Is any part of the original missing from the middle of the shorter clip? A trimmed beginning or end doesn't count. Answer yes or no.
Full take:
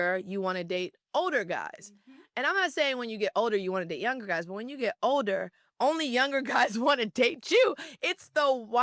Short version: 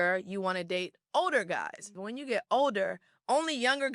yes